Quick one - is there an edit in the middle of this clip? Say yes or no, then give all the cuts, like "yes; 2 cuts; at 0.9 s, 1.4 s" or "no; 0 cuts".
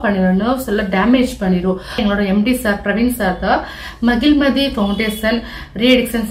yes; 1 cut; at 2.0 s